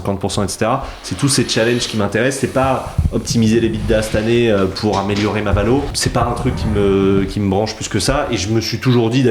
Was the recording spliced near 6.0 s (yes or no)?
yes